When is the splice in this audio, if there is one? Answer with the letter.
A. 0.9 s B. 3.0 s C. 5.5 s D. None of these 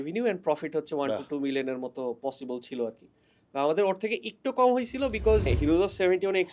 C